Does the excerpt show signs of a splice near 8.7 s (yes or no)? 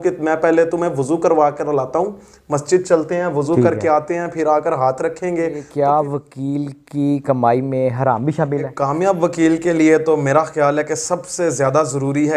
yes